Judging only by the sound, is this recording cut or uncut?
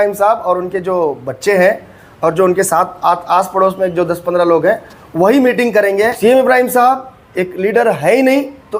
cut